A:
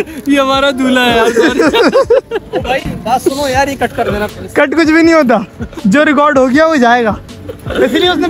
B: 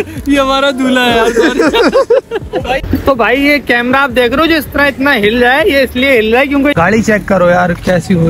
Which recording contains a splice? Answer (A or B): B